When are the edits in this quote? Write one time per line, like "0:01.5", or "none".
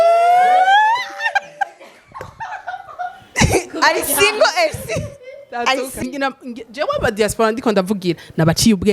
0:06.0

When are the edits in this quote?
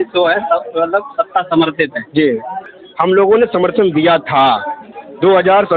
0:02.6

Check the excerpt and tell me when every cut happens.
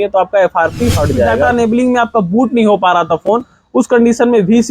0:01.5

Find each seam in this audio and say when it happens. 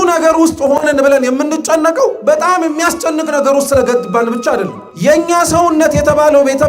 0:04.8

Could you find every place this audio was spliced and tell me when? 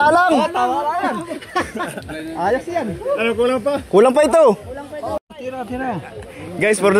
0:05.2

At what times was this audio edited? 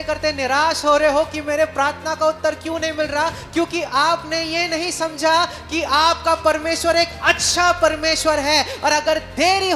none

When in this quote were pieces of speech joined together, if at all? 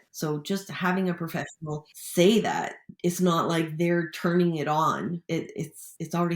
0:05.5

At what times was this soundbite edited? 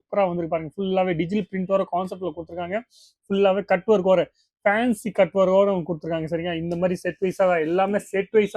none

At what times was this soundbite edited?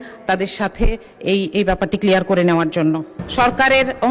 0:03.2

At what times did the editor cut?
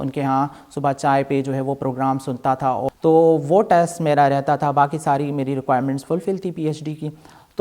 0:02.9

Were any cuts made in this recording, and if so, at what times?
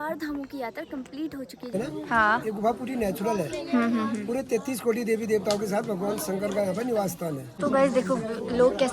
0:01.7
0:07.5

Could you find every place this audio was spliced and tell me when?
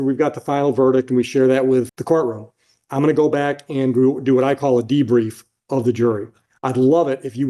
0:01.9

